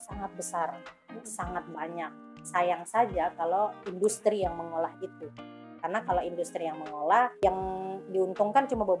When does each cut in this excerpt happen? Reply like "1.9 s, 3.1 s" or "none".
7.4 s